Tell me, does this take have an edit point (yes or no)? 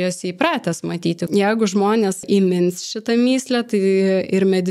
yes